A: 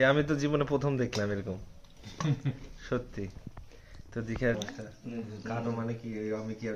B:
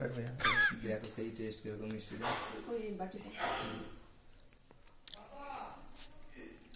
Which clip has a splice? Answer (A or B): A